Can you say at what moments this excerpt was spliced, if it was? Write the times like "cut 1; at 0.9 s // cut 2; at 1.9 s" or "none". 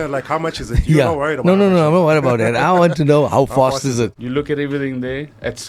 cut 1; at 4.2 s